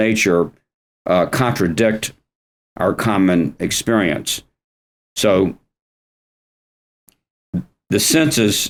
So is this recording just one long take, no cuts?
yes; 0 cuts

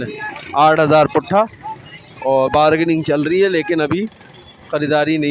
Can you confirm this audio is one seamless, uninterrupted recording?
yes; 0 cuts

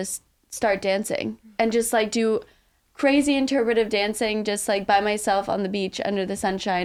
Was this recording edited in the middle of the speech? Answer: no; 0 cuts

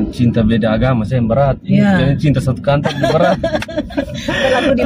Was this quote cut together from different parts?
no; 0 cuts

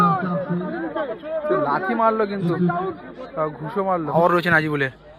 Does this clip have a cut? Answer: yes; 1 cut; at 4.1 s

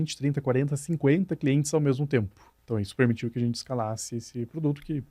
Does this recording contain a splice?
yes; 1 cut; at 2.5 s

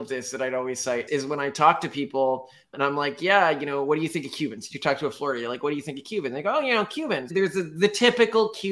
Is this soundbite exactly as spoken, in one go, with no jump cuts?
no; 1 cut; at 7.3 s

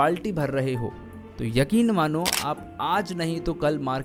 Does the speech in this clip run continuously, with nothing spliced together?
yes; 0 cuts

